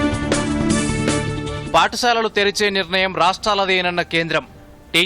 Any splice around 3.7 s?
no; 1 cut; at 1.6 s

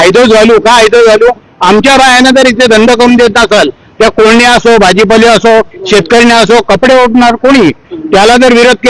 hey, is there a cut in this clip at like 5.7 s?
no; 0 cuts

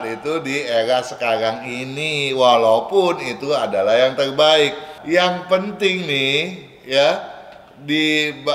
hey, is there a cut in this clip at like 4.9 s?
yes; 1 cut; at 4.9 s

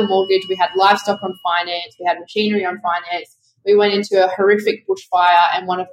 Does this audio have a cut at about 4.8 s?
no; 0 cuts

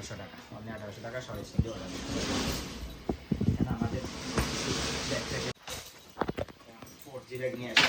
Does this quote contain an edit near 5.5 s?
yes; 1 cut; at 5.5 s

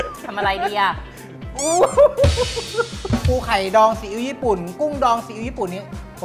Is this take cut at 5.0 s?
no; 1 cut; at 3.2 s

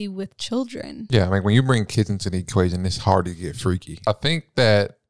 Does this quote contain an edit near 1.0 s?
yes; 2 cuts; at 1.0 s, 4.0 s

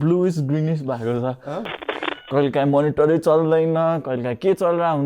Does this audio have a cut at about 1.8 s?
yes; 1 cut; at 1.8 s

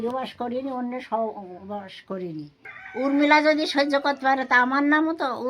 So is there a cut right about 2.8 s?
yes; 1 cut; at 2.8 s

